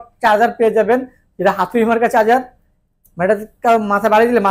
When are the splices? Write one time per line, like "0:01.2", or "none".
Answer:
none